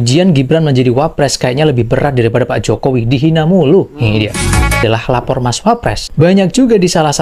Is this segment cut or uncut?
cut